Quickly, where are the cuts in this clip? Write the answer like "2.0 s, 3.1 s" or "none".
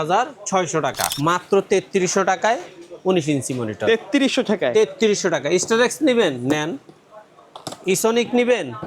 1.0 s